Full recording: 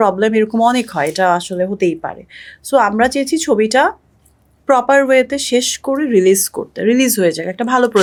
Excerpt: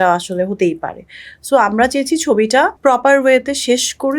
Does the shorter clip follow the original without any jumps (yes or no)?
no